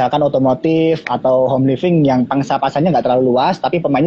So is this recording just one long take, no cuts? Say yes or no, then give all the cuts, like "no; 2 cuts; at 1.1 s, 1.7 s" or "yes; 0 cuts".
yes; 0 cuts